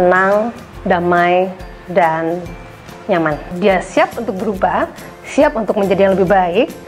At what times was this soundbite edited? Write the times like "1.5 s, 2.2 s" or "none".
3.5 s